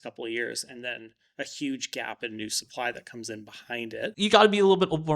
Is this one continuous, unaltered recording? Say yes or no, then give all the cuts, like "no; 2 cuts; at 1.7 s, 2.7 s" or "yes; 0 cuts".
no; 1 cut; at 4.1 s